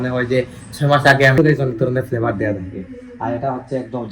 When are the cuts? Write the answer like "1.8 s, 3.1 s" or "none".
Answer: 1.4 s